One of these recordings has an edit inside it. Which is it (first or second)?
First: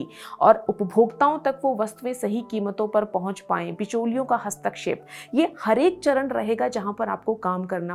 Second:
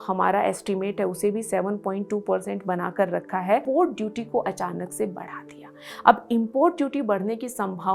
second